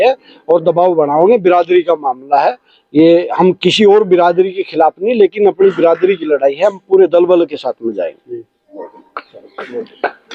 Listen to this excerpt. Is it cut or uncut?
uncut